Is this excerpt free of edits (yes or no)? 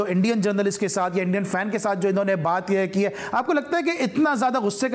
yes